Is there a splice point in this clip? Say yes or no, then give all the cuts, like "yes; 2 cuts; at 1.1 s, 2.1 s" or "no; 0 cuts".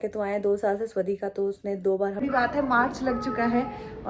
yes; 1 cut; at 2.2 s